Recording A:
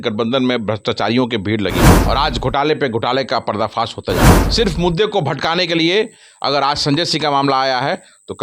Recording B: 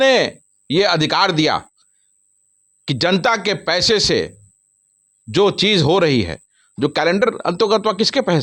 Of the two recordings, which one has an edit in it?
A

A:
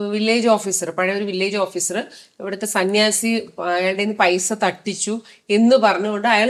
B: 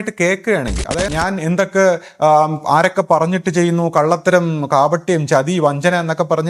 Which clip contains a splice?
B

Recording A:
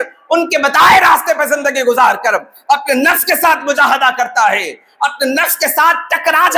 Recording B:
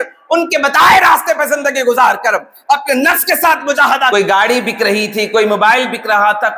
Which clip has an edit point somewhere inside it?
B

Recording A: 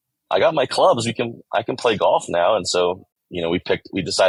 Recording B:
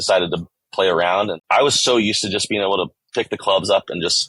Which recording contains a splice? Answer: B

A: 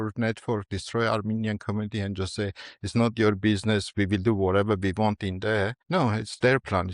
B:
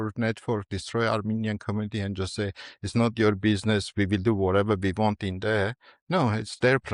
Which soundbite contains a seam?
A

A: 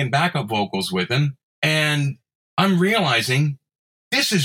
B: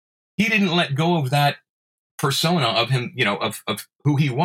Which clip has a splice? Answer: A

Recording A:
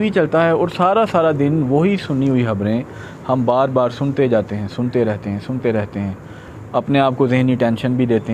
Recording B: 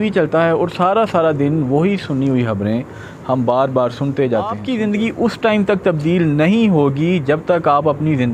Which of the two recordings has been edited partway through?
B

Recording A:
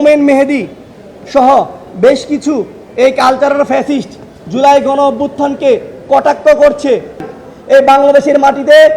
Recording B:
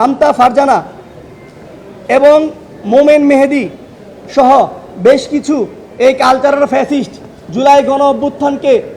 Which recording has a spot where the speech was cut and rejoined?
A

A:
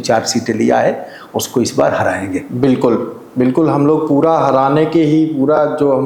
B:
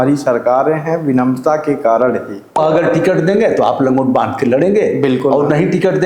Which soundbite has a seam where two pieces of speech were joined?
B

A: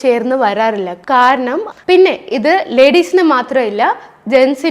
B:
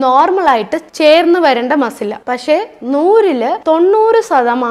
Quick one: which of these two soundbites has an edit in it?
A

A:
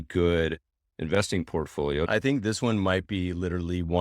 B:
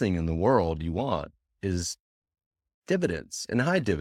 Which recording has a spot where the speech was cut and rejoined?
A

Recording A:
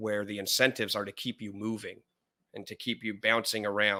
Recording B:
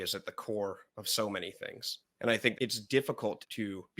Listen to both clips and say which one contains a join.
B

